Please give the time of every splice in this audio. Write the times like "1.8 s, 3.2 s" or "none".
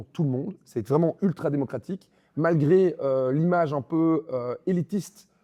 none